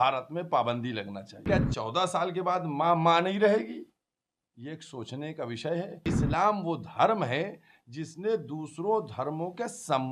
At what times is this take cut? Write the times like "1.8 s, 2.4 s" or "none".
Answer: 1.4 s, 6.1 s